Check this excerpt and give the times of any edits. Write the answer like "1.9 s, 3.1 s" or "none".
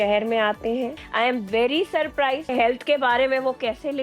1.0 s, 2.5 s

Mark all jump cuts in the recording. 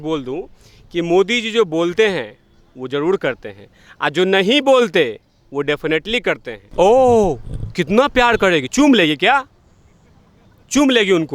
6.6 s

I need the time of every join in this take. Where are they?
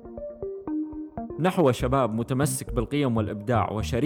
1.3 s

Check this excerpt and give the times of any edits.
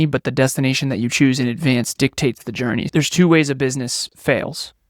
2.9 s

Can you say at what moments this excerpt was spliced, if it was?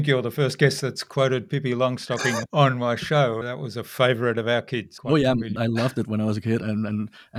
2.4 s, 3.5 s, 4.9 s, 5.5 s, 6.6 s

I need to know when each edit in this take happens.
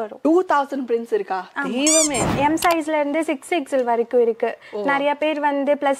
2.3 s

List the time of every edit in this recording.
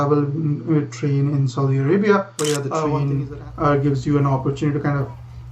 2.7 s

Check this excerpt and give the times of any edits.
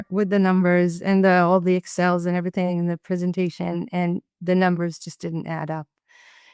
none

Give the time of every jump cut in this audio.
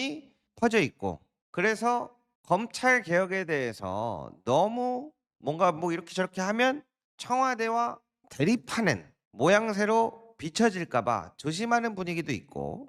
none

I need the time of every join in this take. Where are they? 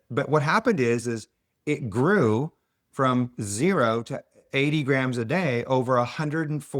none

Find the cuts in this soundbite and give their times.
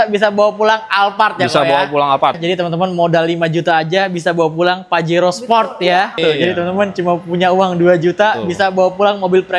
2.4 s, 6.2 s

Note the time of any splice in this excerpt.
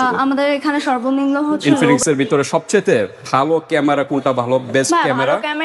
1.6 s

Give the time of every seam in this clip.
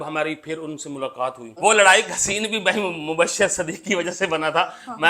1.5 s

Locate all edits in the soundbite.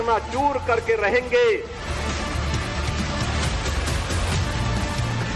none

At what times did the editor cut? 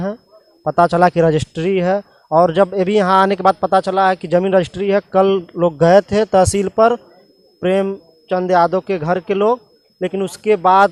none

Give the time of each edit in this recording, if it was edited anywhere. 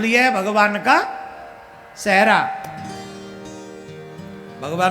none

